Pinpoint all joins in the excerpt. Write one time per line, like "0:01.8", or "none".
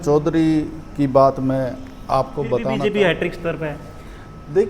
0:02.7